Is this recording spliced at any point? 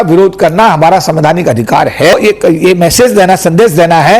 yes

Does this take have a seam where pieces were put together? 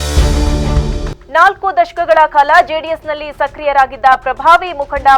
yes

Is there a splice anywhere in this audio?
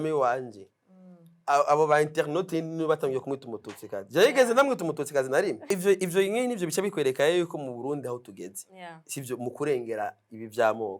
yes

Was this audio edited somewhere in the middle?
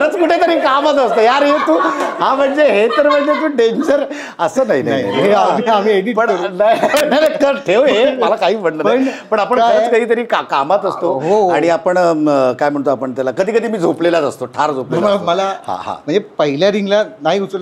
no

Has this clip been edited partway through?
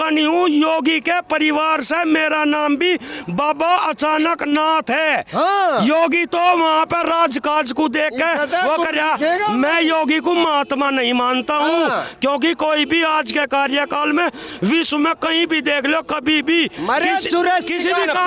no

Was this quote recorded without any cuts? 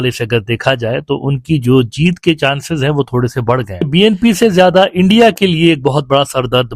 no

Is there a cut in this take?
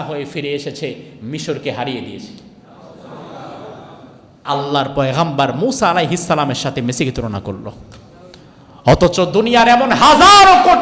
no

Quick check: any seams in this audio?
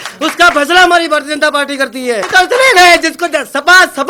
yes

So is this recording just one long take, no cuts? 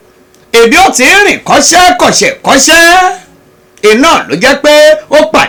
yes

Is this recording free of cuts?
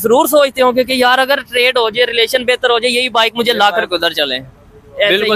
yes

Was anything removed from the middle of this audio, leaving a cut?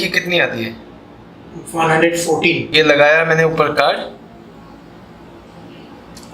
yes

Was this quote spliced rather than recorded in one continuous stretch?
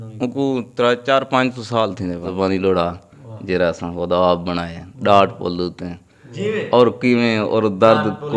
yes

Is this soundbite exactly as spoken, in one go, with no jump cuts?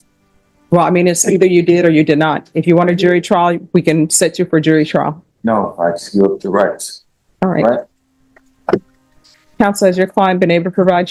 yes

